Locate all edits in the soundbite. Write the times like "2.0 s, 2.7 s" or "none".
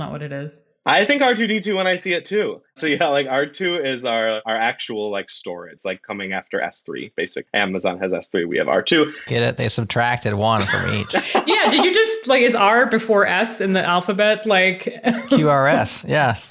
4.4 s, 5.8 s, 7.4 s